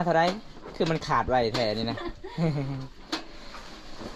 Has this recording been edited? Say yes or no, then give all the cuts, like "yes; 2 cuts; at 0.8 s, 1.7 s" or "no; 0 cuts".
no; 0 cuts